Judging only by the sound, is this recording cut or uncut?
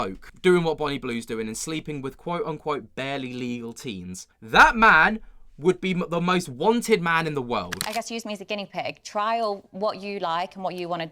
cut